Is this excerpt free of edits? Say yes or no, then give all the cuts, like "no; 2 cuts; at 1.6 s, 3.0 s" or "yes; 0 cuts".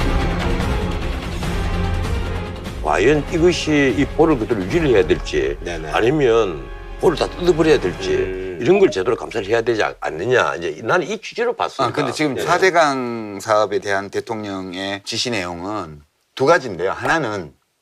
yes; 0 cuts